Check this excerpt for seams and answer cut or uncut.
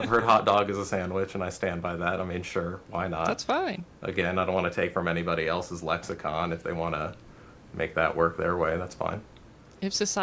uncut